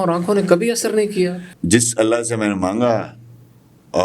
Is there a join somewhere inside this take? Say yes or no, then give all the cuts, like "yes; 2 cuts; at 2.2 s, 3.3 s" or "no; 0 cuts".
yes; 1 cut; at 1.5 s